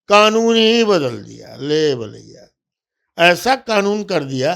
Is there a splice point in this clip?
no; 0 cuts

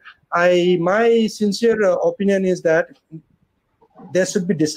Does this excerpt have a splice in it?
no; 0 cuts

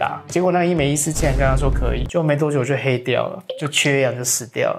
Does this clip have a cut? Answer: yes; 1 cut; at 2.0 s

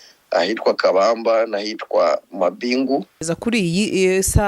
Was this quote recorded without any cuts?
no; 1 cut; at 3.3 s

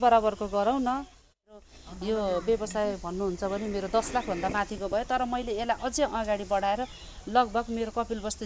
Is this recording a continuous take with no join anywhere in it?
no; 1 cut; at 1.5 s

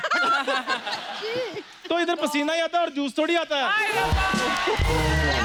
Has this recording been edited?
no; 0 cuts

